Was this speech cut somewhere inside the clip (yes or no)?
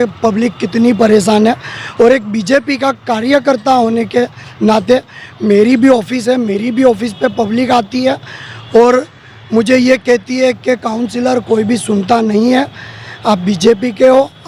no